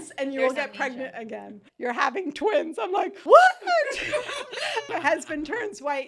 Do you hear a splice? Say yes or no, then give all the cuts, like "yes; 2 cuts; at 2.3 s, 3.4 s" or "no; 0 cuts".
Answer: yes; 3 cuts; at 1.6 s, 3.2 s, 4.9 s